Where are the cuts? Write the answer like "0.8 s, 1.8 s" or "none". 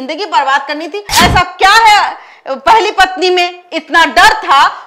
1.1 s